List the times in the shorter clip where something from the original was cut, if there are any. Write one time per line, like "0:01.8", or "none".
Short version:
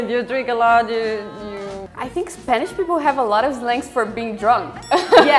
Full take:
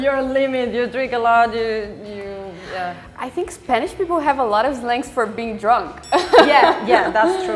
0:01.9